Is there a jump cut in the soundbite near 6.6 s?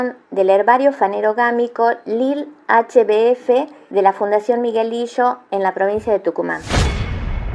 yes; 1 cut; at 6.6 s

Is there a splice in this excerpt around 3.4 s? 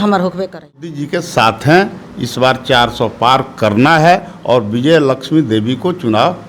no; 1 cut; at 1.0 s

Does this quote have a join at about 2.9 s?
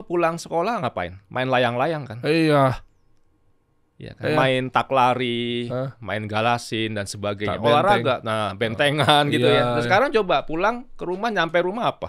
no; 0 cuts

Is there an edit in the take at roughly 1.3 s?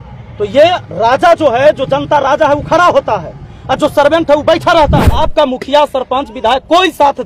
no; 1 cut; at 5.2 s

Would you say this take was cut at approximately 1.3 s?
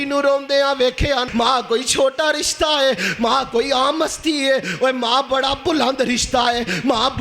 yes; 1 cut; at 1.3 s

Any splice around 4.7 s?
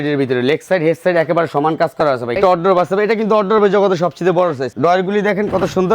yes; 2 cuts; at 2.4 s, 4.7 s

